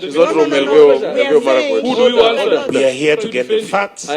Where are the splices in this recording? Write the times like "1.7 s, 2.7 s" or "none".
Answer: 2.7 s